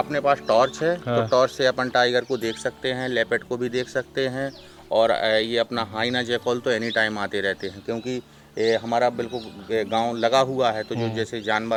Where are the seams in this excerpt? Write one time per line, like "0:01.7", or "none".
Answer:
none

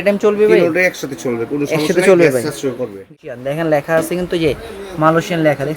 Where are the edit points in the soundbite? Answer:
0:03.1

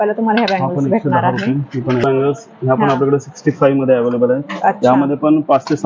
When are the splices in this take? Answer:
0:02.0

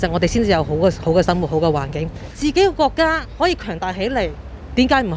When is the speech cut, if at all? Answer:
0:02.3

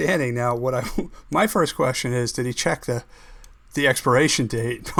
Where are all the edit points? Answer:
none

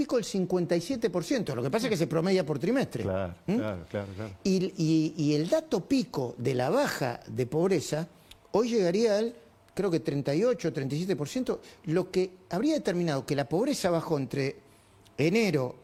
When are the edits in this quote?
none

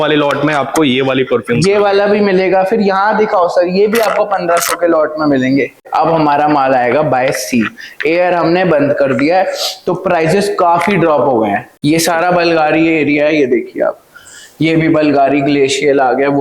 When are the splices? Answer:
0:05.9
0:11.7

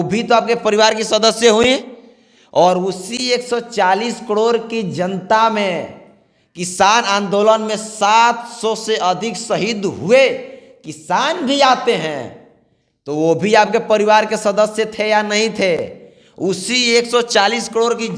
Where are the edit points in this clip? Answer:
none

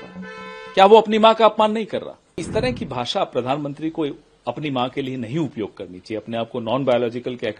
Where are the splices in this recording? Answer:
0:02.5

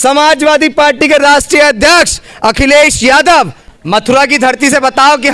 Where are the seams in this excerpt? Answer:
0:03.6

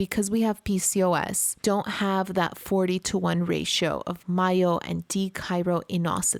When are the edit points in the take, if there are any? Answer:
none

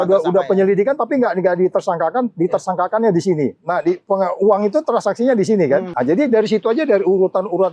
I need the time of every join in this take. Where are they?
0:05.9

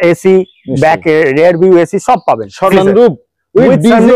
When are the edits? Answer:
0:02.7

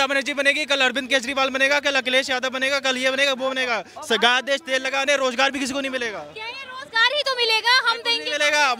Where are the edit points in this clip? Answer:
none

